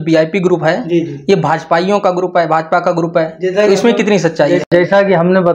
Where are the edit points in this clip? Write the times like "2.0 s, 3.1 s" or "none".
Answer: none

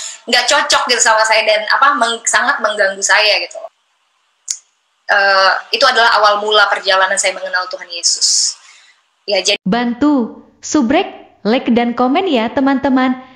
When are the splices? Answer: 3.7 s, 9.6 s

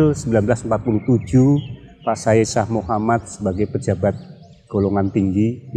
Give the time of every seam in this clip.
none

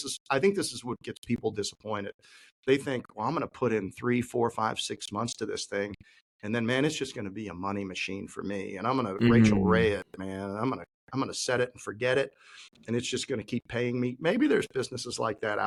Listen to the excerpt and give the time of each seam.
none

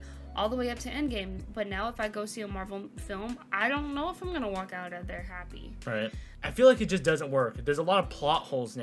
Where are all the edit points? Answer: 6.3 s

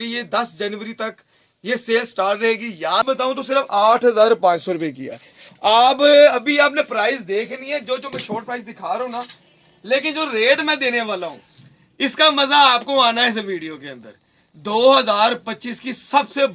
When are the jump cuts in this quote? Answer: 3.0 s

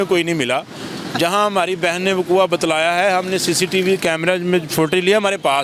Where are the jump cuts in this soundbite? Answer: none

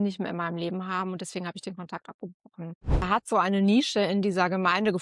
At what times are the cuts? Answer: 3.1 s

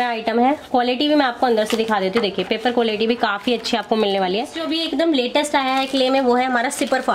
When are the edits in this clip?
4.6 s

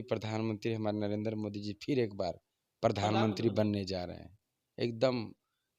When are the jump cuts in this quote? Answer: none

